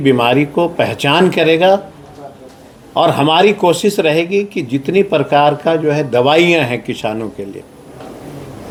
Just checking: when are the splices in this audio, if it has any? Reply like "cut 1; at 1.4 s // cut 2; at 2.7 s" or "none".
none

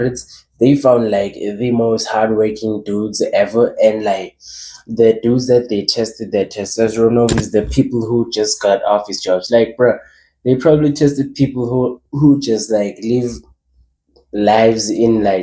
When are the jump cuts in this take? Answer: none

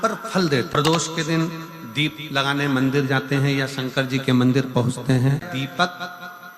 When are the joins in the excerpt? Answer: cut 1; at 0.8 s // cut 2; at 5.4 s

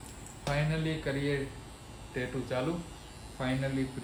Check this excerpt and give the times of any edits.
none

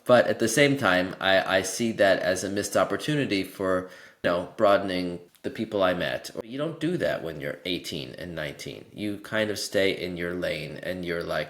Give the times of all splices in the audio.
cut 1; at 4.2 s // cut 2; at 5.3 s // cut 3; at 6.3 s

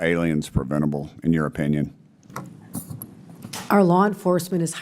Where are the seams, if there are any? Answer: cut 1; at 2.2 s

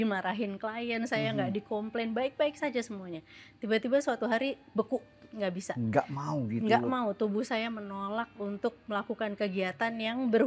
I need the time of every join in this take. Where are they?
none

